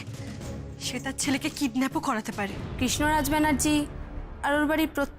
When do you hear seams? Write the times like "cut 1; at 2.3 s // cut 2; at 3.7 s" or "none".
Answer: cut 1; at 2.6 s